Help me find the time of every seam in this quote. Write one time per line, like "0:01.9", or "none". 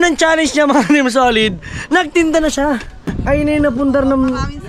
0:03.2